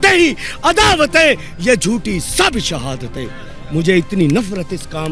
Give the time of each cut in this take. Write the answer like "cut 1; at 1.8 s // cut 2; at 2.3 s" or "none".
none

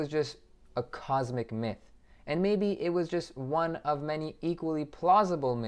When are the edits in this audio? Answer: none

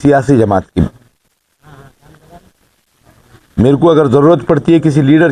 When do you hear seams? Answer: none

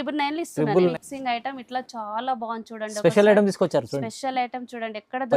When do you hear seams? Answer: cut 1; at 0.9 s

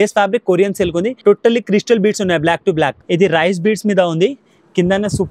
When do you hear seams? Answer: cut 1; at 1.1 s // cut 2; at 3.0 s

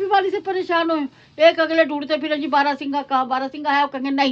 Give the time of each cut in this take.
none

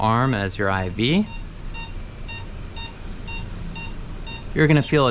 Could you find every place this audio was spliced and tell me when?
cut 1; at 1.4 s

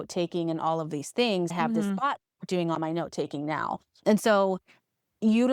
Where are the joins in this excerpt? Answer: cut 1; at 1.5 s

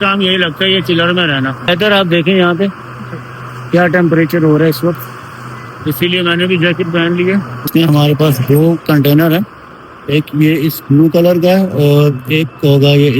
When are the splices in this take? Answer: cut 1; at 1.6 s // cut 2; at 7.6 s

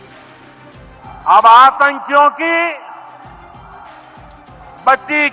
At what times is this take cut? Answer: cut 1; at 1.0 s

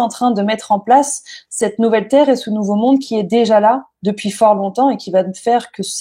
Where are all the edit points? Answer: none

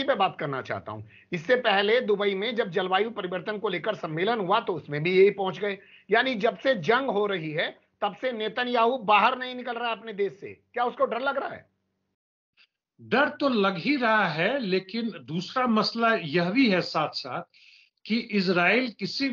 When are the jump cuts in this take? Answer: none

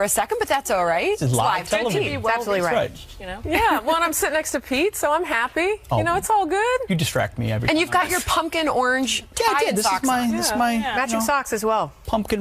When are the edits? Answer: cut 1; at 9.7 s

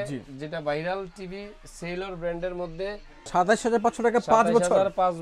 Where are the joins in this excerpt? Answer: cut 1; at 3.2 s

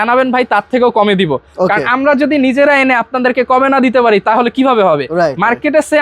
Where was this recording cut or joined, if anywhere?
none

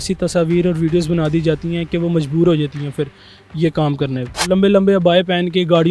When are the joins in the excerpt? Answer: cut 1; at 4.4 s

